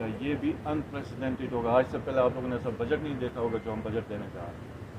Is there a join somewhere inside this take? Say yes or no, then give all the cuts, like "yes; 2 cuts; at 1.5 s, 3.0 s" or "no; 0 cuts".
no; 0 cuts